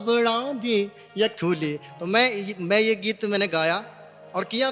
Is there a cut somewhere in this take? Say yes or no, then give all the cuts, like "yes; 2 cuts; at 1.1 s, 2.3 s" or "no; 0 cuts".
no; 0 cuts